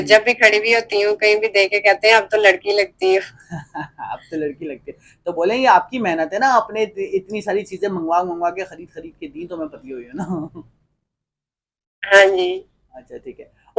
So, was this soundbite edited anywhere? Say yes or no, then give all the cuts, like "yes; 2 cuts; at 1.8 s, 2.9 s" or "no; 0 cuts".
no; 0 cuts